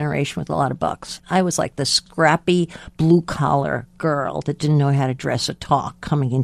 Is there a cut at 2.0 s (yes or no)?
yes